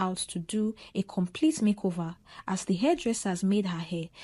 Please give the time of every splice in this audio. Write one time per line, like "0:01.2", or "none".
none